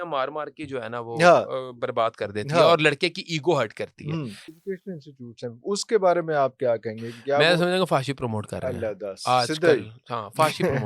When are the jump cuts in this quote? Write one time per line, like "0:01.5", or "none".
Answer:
0:04.6